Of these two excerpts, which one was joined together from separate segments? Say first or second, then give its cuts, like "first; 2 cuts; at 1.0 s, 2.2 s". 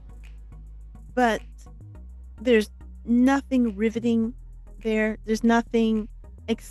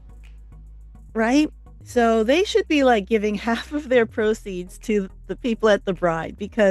second; 1 cut; at 1.1 s